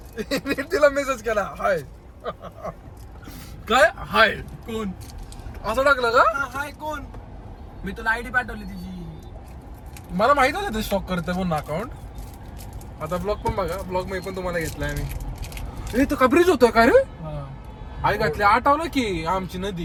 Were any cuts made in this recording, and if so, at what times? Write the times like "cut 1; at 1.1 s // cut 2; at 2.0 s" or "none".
none